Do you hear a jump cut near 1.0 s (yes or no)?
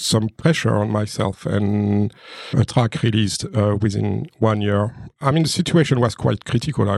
no